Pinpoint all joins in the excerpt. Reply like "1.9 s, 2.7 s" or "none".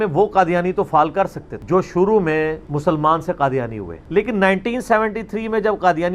none